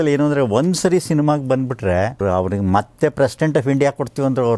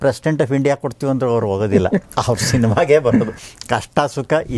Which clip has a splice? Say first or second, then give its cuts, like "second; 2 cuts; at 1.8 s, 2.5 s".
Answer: first; 1 cut; at 2.2 s